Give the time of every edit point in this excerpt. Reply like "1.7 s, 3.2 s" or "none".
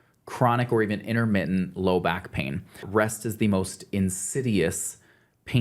2.8 s